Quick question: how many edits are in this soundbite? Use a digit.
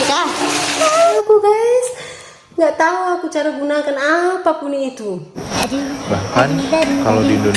2